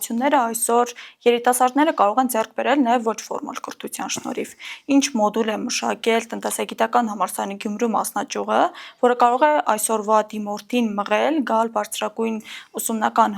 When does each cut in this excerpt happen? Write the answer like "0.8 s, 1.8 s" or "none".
none